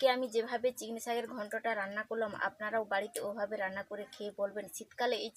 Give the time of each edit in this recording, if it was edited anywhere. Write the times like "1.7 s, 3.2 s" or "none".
none